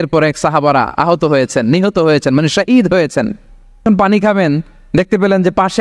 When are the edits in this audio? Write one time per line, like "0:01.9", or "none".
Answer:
0:03.8